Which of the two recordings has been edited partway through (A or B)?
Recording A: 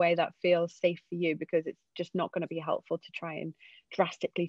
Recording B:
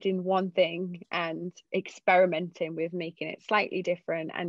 B